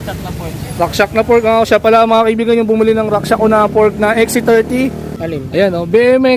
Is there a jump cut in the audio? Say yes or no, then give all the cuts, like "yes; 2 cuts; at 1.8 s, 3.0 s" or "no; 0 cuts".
yes; 1 cut; at 5.1 s